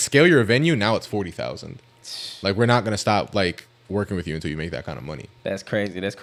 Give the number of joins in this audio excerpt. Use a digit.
0